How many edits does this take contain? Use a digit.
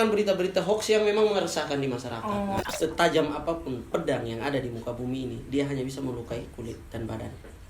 1